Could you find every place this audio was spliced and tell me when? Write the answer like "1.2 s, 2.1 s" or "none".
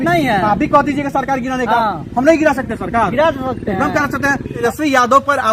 4.6 s